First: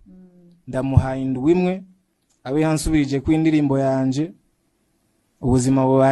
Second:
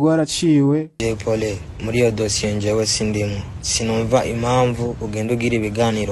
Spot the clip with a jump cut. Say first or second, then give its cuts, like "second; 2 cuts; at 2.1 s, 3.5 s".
second; 1 cut; at 0.9 s